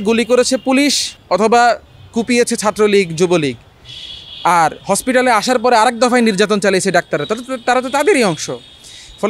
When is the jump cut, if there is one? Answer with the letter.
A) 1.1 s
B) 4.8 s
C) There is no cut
A